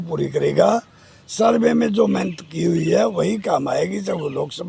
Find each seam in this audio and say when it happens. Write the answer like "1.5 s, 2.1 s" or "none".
none